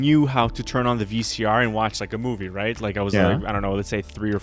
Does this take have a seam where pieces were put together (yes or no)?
no